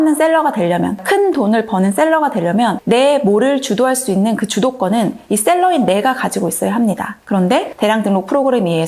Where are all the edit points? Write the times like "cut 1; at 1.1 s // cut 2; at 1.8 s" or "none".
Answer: cut 1; at 1.0 s // cut 2; at 2.8 s // cut 3; at 7.6 s

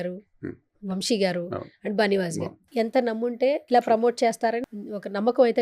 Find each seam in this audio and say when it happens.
cut 1; at 2.6 s // cut 2; at 3.6 s // cut 3; at 4.6 s

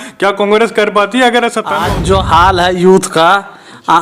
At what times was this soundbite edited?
cut 1; at 1.8 s

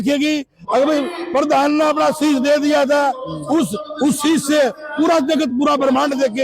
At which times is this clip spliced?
none

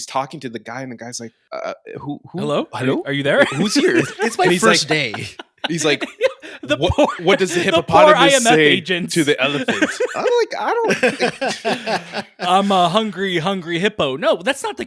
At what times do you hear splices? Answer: cut 1; at 1.3 s

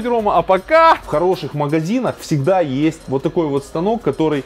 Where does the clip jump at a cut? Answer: cut 1; at 1.0 s // cut 2; at 3.0 s

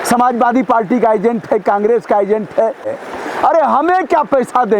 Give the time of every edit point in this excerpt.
cut 1; at 2.9 s

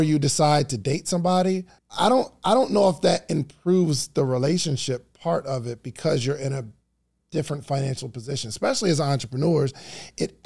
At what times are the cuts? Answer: cut 1; at 1.8 s

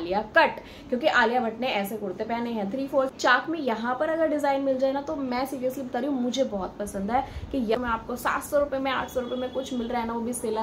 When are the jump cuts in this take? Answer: cut 1; at 3.1 s // cut 2; at 7.8 s

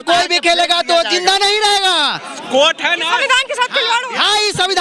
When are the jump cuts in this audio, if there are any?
none

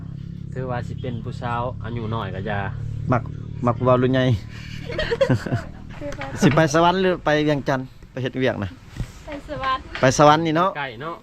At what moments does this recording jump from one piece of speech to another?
cut 1; at 6.0 s

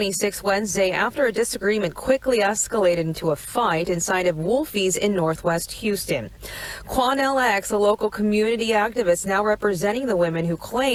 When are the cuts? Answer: none

